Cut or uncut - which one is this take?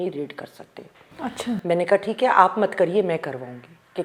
uncut